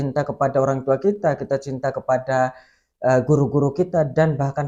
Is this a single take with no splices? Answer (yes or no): yes